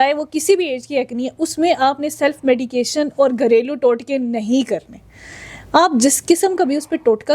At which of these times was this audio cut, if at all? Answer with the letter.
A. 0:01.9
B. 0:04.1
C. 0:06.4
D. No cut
D